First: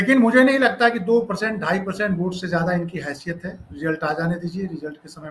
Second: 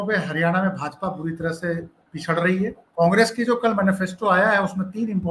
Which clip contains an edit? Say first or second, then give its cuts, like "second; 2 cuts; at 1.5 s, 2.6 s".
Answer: second; 1 cut; at 2.8 s